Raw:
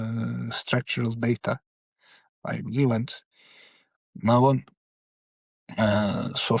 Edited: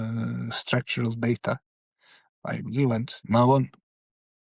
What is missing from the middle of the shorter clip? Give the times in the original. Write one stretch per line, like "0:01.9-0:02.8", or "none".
0:03.1-0:04.1